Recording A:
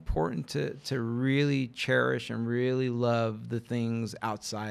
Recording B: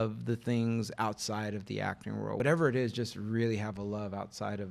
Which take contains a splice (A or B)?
B